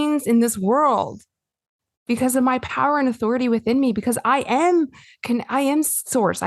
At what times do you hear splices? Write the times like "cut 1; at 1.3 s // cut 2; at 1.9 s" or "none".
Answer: cut 1; at 1.9 s